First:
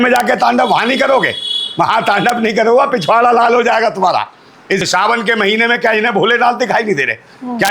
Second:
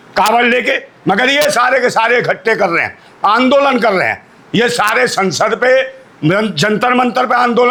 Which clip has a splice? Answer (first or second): first